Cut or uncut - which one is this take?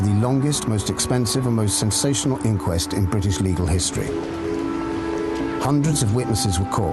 uncut